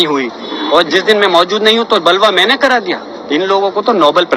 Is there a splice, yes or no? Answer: no